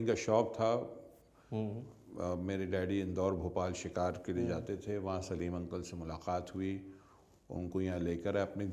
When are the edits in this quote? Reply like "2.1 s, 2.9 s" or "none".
none